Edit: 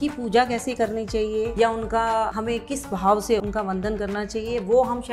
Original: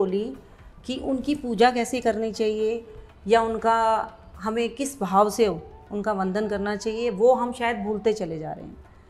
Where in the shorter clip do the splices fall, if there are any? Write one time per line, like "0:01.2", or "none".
0:01.5
0:02.4
0:03.4